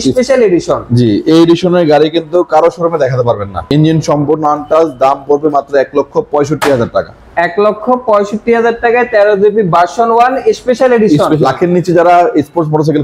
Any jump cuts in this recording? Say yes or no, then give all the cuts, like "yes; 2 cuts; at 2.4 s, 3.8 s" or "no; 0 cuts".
yes; 2 cuts; at 3.6 s, 11.4 s